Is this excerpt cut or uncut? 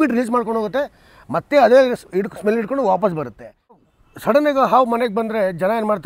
cut